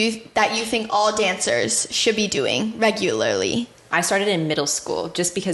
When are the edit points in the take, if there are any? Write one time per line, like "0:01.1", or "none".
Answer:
0:03.9